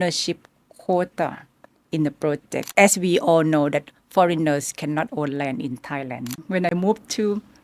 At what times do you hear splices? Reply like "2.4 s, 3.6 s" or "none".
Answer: 2.7 s, 6.3 s